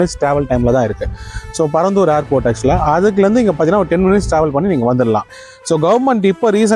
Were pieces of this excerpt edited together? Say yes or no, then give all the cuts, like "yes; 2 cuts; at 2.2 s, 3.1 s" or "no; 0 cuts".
yes; 1 cut; at 5.4 s